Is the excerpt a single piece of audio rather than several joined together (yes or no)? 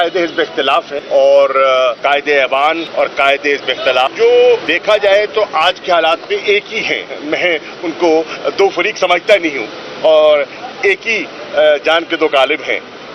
no